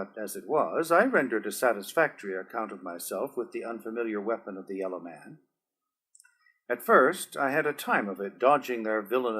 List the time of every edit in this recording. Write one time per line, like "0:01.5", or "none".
0:07.8